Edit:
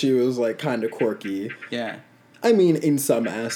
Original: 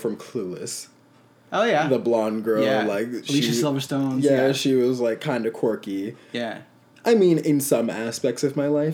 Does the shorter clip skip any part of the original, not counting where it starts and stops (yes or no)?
no